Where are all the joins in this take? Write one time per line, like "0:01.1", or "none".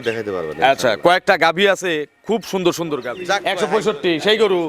0:03.5